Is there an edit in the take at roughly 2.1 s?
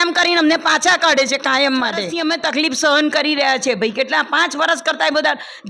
yes; 1 cut; at 2.1 s

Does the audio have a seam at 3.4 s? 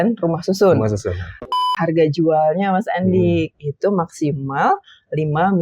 no; 1 cut; at 1.6 s

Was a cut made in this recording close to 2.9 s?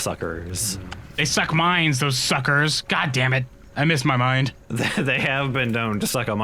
no; 2 cuts; at 1.4 s, 4.6 s

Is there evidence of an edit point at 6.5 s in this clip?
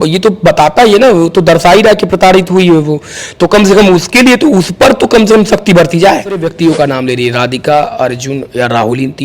yes; 1 cut; at 6.5 s

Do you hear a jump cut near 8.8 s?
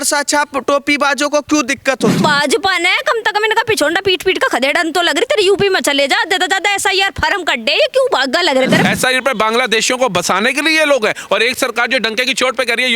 yes; 2 cuts; at 2.2 s, 8.8 s

